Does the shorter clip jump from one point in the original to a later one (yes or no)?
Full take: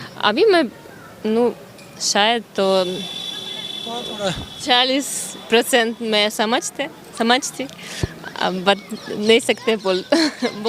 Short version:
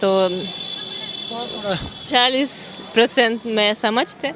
no